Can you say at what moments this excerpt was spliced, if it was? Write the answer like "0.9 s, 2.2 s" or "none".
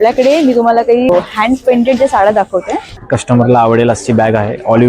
1.1 s, 3.1 s